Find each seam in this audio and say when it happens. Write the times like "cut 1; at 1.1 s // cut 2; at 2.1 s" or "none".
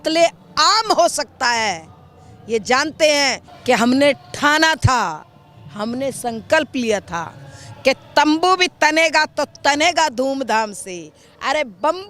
cut 1; at 3.5 s